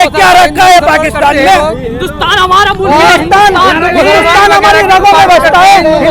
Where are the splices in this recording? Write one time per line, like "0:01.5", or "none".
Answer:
none